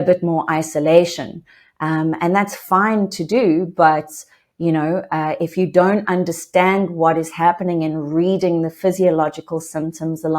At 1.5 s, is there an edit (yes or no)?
no